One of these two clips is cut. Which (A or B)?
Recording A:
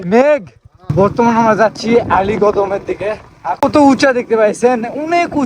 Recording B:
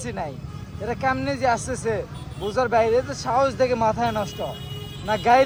A